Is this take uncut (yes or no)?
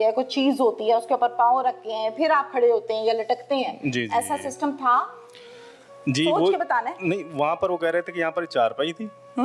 yes